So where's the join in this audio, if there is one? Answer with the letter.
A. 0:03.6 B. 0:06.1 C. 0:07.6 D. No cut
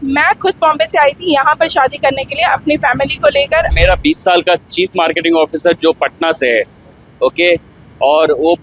A